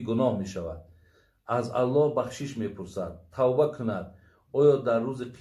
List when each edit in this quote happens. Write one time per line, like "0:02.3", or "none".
none